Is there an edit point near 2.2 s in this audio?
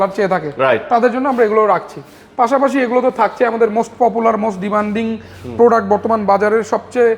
no; 0 cuts

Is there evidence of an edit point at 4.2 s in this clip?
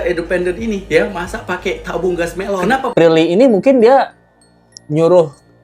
no; 1 cut; at 2.9 s

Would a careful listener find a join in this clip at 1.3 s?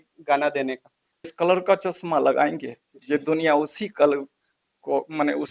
yes; 1 cut; at 1.3 s

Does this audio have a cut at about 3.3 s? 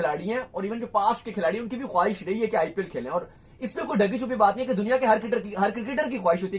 no; 0 cuts

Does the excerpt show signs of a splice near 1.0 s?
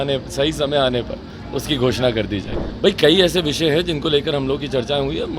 no; 1 cut; at 2.5 s

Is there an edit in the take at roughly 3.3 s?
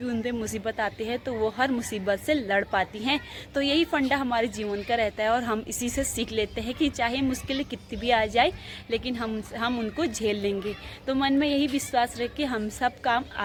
no; 0 cuts

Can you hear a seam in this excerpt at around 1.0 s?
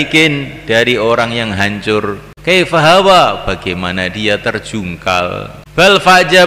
no; 2 cuts; at 2.3 s, 5.6 s

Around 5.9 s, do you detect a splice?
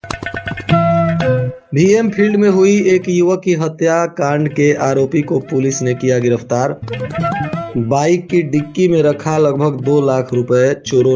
no; 1 cut; at 1.6 s

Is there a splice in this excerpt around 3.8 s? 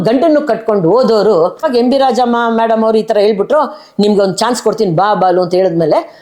no; 1 cut; at 1.6 s

